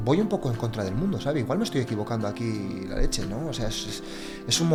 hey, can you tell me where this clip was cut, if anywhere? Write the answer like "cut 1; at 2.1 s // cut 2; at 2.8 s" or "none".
none